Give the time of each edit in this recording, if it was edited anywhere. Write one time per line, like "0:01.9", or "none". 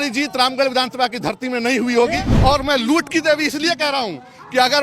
0:02.2